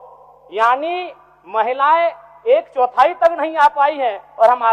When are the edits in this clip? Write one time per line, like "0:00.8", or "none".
none